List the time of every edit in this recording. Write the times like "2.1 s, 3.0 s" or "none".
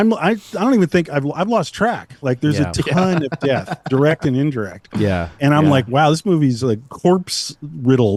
none